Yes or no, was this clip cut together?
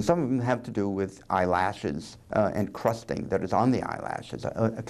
no